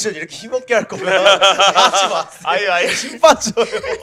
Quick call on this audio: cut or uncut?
uncut